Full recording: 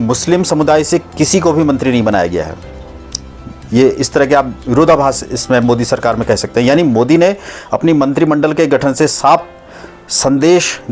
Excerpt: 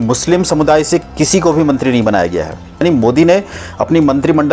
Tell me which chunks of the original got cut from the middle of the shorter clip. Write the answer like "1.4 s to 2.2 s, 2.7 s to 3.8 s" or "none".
2.8 s to 6.7 s

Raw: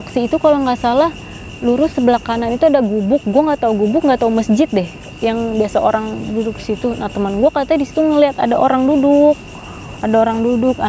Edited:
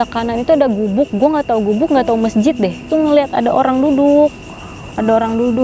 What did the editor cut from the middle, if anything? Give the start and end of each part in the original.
5.0 s to 7.9 s

